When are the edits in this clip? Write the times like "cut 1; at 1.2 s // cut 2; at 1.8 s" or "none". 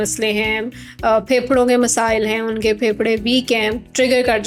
none